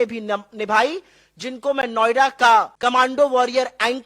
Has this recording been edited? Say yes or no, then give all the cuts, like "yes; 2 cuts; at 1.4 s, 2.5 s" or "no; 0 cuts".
yes; 1 cut; at 2.7 s